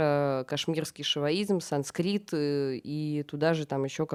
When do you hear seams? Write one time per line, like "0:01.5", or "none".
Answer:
none